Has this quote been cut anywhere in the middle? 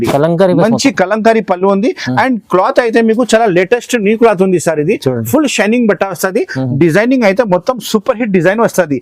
no; 0 cuts

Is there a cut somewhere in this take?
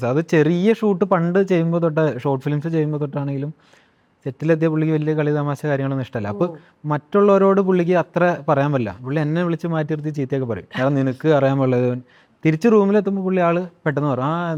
no; 0 cuts

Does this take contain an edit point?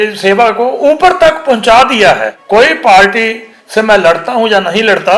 yes; 1 cut; at 2.3 s

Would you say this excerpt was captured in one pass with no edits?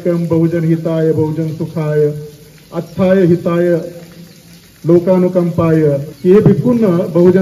no; 1 cut; at 6.1 s

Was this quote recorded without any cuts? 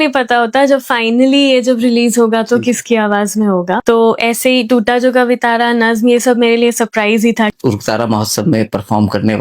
no; 2 cuts; at 3.8 s, 7.5 s

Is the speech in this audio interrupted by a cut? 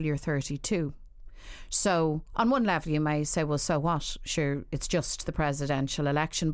no; 0 cuts

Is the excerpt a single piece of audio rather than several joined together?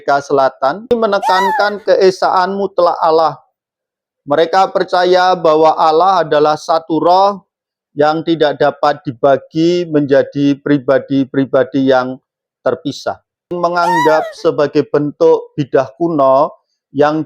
no; 2 cuts; at 0.9 s, 13.5 s

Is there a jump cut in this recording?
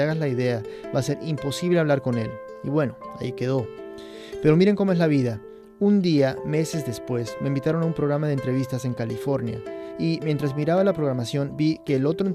no; 0 cuts

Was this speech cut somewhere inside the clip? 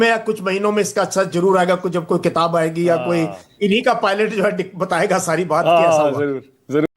no; 0 cuts

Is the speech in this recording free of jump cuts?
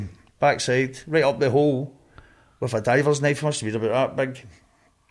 yes; 0 cuts

